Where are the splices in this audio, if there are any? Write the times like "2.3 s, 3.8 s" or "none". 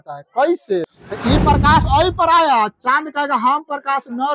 0.9 s

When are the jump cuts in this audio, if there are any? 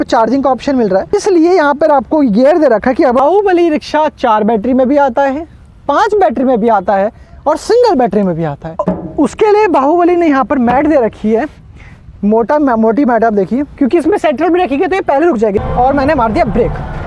1.1 s, 3.2 s, 8.8 s, 13.7 s, 15.6 s

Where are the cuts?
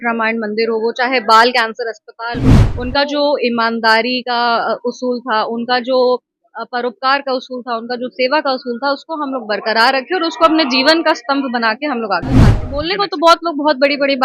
2.7 s, 12.7 s

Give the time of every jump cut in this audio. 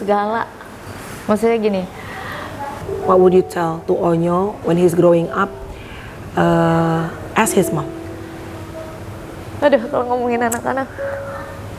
2.9 s

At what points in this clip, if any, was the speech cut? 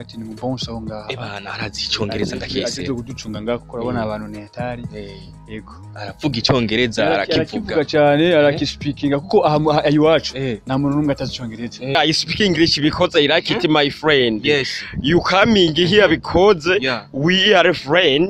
12.0 s

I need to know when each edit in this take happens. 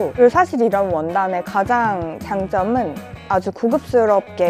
none

